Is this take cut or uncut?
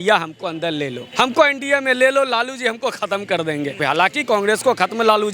cut